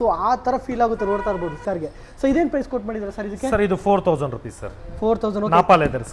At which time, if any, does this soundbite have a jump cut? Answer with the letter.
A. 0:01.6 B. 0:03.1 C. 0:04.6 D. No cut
A